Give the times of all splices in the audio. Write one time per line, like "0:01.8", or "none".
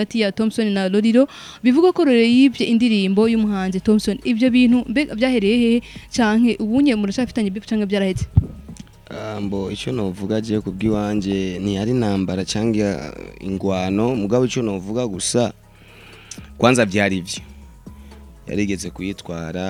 none